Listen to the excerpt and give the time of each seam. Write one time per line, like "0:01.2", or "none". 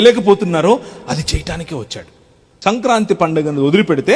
0:02.5

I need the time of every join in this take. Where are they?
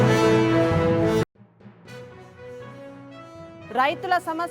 0:01.2
0:03.3

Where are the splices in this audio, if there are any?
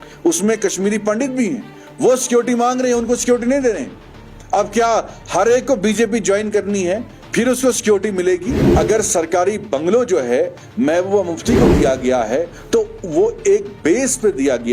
0:08.6
0:12.6

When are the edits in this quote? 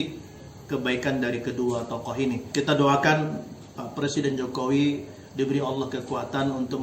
0:02.5

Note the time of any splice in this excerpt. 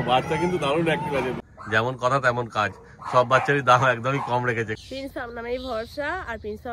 0:01.5
0:04.8

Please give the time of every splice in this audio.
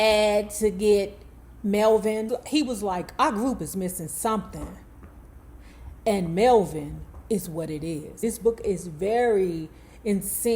0:02.4

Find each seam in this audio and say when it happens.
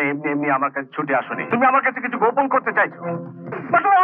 0:01.4

